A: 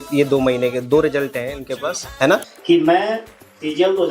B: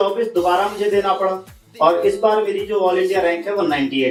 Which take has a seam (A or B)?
A